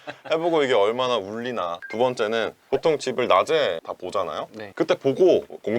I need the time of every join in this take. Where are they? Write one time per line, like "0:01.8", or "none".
0:01.8